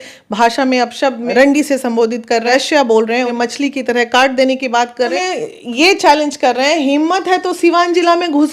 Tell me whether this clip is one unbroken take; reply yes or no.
no